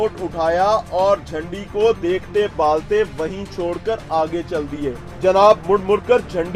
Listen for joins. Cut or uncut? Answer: uncut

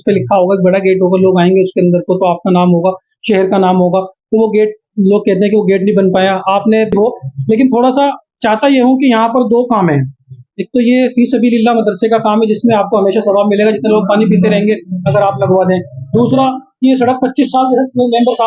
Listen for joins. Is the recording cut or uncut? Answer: cut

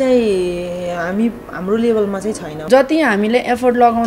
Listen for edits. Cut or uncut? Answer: cut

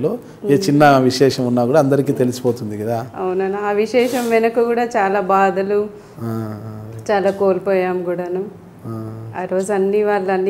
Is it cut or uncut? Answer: uncut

